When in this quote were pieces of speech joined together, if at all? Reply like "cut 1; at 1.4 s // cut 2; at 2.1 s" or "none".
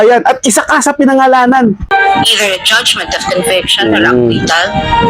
cut 1; at 1.9 s

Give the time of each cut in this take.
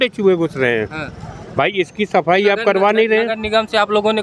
none

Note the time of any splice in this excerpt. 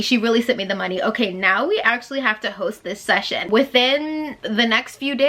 cut 1; at 3.5 s

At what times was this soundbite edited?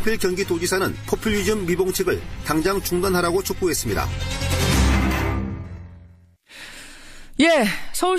none

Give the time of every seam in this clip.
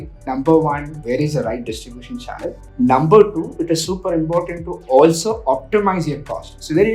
cut 1; at 0.9 s // cut 2; at 2.6 s

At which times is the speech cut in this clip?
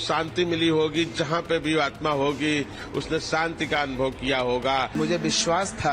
cut 1; at 5.0 s

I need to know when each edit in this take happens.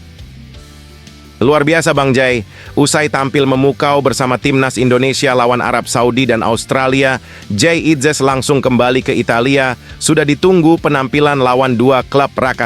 cut 1; at 1.4 s

